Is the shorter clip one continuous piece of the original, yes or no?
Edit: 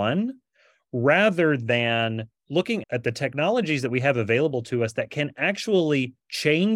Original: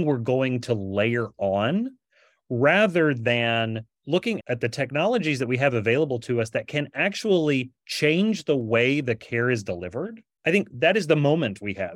yes